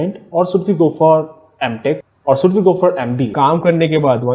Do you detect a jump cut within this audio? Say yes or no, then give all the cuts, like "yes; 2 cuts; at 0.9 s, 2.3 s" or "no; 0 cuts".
yes; 2 cuts; at 2.1 s, 3.3 s